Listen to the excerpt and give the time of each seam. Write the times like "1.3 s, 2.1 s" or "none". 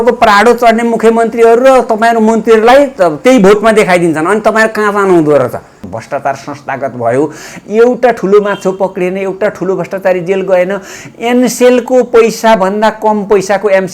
5.8 s

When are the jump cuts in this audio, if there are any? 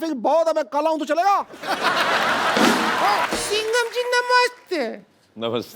3.3 s

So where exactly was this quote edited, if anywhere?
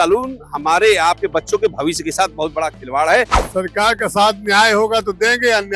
3.4 s

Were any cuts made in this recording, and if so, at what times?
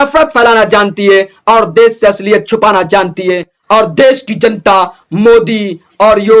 3.6 s

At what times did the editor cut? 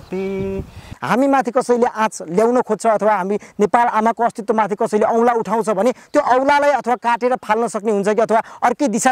0.9 s

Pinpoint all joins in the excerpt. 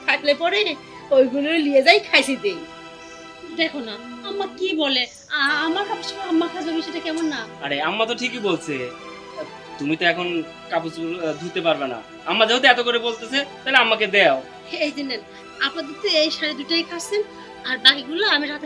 14.6 s

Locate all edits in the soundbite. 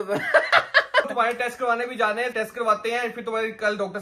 1.1 s, 2.3 s

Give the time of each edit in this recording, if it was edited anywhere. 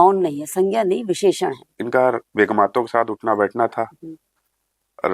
1.7 s

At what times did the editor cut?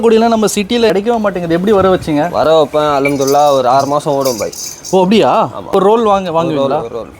0.9 s, 5.7 s

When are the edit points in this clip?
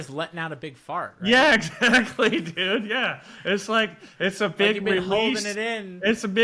none

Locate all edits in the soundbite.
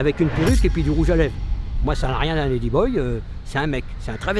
none

